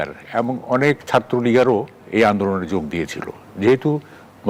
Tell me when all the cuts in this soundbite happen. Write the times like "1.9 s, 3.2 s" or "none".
none